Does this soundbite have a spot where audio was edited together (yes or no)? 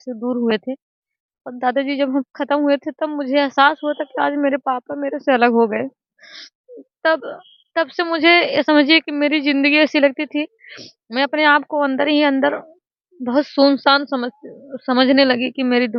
no